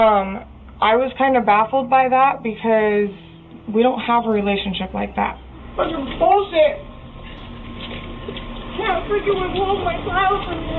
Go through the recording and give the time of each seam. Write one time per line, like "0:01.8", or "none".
0:05.6